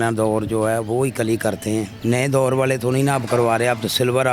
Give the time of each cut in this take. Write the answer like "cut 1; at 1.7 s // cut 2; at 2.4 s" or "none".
cut 1; at 1.9 s